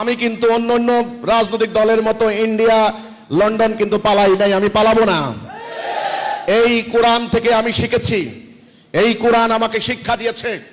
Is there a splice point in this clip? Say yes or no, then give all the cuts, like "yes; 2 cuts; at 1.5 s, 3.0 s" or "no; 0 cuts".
no; 0 cuts